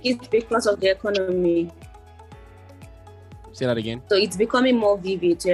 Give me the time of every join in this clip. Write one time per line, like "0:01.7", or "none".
none

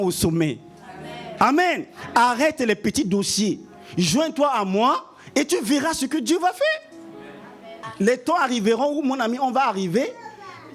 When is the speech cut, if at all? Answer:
0:07.8

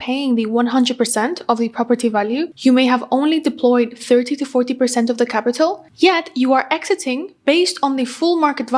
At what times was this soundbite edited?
none

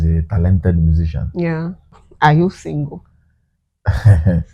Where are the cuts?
0:02.0

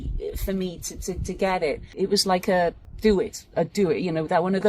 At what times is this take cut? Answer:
0:01.9
0:02.9

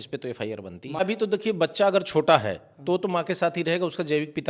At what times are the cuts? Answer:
0:01.0

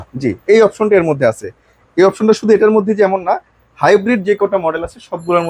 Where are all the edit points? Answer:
none

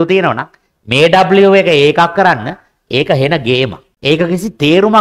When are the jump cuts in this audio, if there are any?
0:03.9

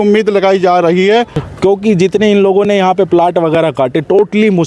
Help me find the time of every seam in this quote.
0:01.4

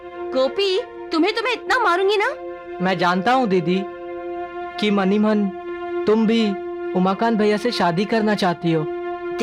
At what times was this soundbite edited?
none

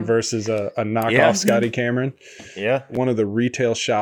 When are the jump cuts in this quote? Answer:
0:02.9

